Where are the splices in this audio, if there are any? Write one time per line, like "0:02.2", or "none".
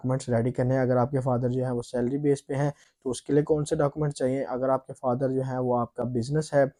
none